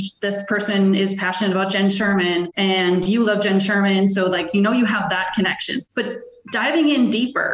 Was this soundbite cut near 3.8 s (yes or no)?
no